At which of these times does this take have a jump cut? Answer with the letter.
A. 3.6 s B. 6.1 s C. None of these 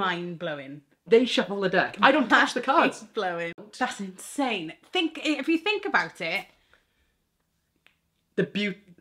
A